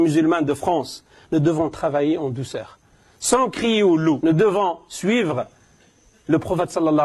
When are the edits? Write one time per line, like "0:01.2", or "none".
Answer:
0:04.2